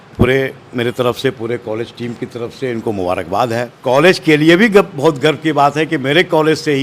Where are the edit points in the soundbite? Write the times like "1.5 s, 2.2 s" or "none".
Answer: 3.7 s